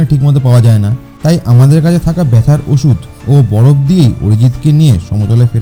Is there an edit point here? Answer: no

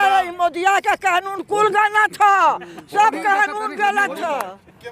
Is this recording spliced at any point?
no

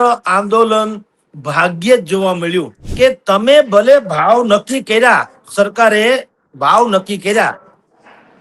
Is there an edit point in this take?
yes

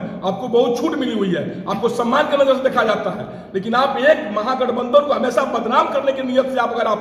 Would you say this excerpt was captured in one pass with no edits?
yes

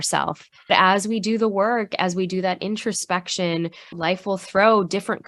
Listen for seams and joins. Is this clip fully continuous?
no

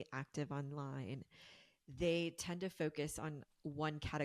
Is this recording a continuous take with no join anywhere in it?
yes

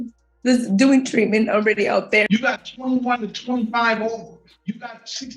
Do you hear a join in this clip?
yes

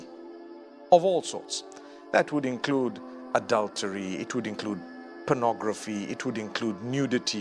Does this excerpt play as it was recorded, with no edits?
yes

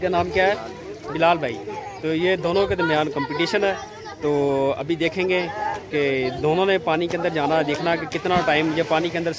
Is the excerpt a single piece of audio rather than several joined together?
yes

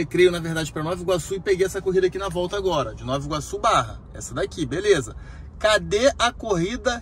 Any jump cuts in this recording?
no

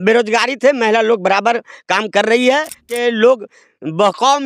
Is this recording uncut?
no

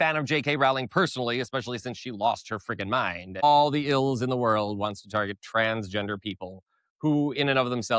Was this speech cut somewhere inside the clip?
yes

